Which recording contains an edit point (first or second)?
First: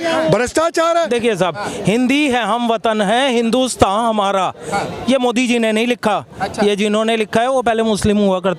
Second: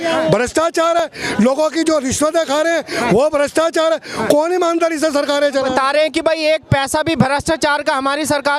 first